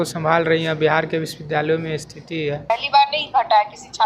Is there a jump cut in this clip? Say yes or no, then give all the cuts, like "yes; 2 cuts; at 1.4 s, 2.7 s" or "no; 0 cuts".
yes; 1 cut; at 2.7 s